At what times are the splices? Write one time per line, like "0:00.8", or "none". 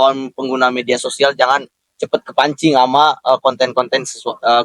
none